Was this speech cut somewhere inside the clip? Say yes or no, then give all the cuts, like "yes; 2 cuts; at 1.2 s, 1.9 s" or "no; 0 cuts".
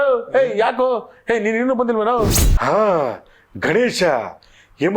yes; 1 cut; at 2.4 s